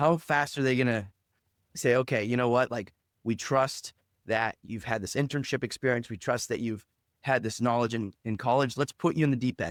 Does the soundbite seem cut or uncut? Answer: uncut